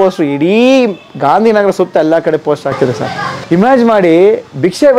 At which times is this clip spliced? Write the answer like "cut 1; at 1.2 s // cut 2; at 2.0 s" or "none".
cut 1; at 3.3 s